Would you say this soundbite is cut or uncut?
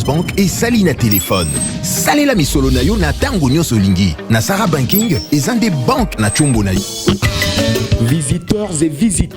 cut